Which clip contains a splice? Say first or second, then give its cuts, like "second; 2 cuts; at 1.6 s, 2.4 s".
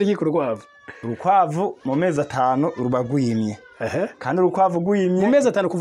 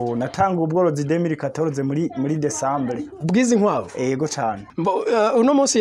second; 1 cut; at 4.7 s